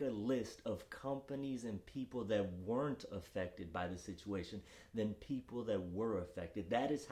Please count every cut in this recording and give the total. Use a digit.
0